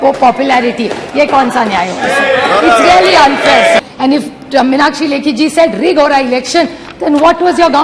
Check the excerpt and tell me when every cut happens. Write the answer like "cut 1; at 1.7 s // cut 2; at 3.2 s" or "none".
cut 1; at 3.8 s

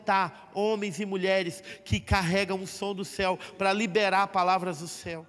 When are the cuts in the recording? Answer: none

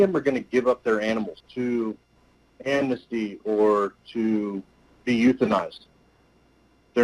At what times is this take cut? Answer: cut 1; at 1.4 s

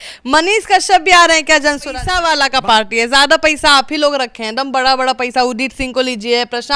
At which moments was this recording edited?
cut 1; at 2.0 s

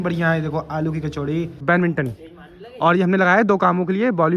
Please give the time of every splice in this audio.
cut 1; at 1.6 s

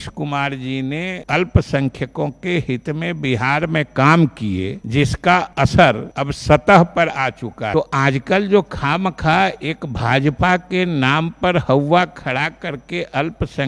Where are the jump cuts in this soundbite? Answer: cut 1; at 1.2 s // cut 2; at 4.8 s // cut 3; at 5.7 s // cut 4; at 7.7 s

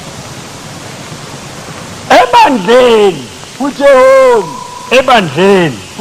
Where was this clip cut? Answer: none

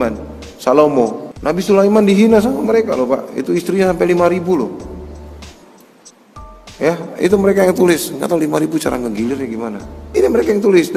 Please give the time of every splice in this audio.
cut 1; at 1.3 s // cut 2; at 9.9 s

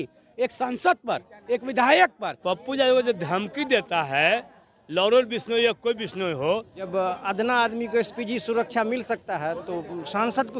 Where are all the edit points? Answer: cut 1; at 2.3 s // cut 2; at 6.9 s

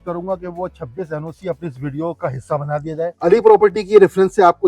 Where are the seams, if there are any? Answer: cut 1; at 3.2 s

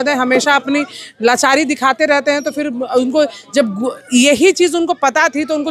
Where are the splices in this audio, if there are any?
none

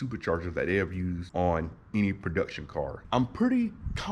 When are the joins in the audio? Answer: cut 1; at 3.0 s

